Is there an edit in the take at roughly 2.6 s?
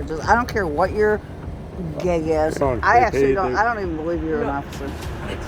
yes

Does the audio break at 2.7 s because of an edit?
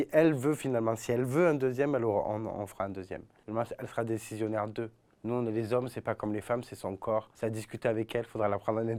no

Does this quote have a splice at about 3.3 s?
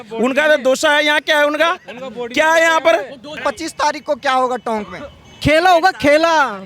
yes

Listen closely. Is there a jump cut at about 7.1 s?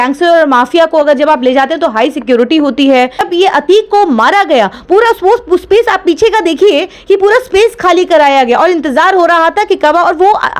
no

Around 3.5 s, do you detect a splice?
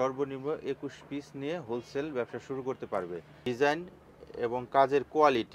yes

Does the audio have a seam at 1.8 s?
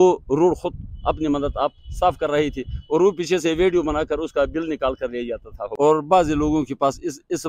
no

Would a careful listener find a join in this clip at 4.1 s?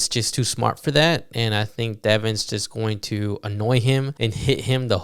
yes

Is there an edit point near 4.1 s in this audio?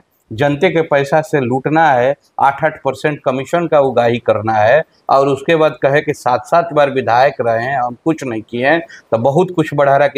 no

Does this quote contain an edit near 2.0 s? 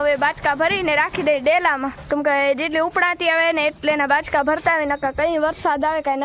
yes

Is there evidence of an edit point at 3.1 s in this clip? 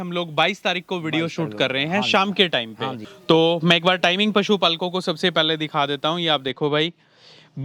no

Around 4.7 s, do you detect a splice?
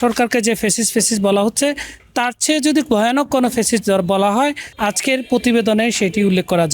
yes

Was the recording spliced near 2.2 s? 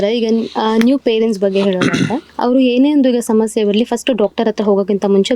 yes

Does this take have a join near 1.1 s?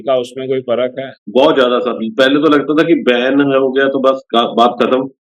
yes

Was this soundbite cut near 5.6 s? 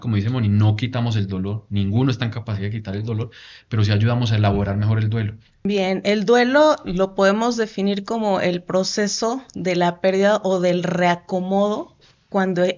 yes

